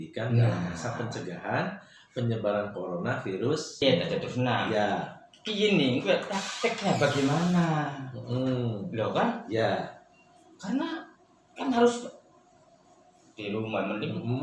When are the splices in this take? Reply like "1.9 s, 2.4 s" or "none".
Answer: 3.8 s

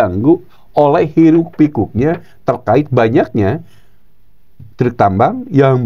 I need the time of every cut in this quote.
none

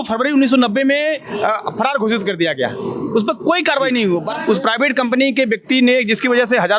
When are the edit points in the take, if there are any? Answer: 4.3 s

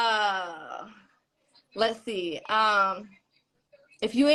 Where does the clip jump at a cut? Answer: none

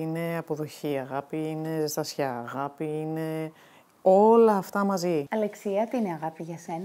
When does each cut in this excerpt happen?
none

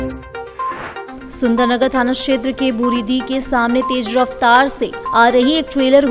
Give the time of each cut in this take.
1.2 s

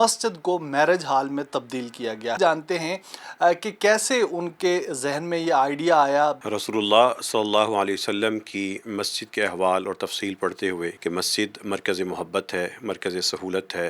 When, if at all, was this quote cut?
2.4 s, 6.4 s, 11.0 s

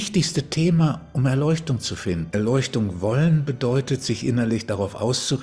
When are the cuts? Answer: 2.2 s

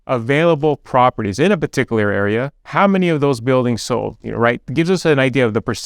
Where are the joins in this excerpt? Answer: none

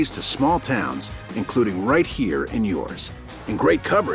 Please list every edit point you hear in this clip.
none

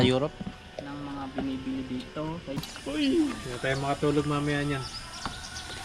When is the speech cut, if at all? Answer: 2.6 s

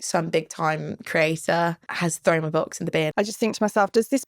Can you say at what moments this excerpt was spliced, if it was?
1.9 s, 3.1 s

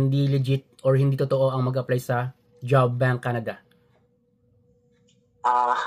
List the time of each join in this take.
none

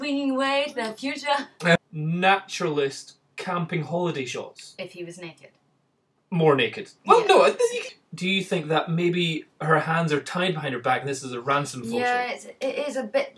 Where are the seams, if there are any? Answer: 1.8 s, 7.9 s

